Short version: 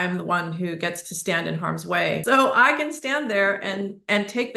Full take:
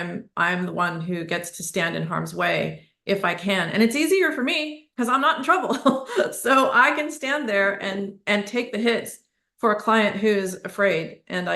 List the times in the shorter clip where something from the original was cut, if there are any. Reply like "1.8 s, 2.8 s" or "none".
2.2 s